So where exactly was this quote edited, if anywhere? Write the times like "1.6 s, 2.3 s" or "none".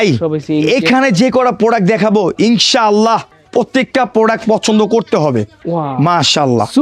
3.4 s, 5.6 s